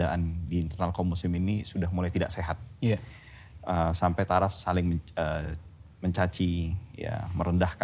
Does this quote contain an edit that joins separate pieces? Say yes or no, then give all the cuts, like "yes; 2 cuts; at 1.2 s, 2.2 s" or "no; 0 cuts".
no; 0 cuts